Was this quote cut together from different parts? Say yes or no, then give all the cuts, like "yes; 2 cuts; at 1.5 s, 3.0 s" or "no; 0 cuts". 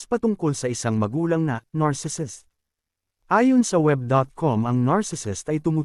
no; 0 cuts